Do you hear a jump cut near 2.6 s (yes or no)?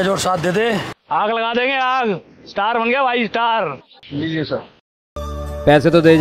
no